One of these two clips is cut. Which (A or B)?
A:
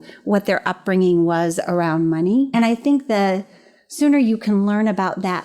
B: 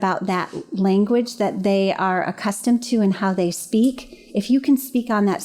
A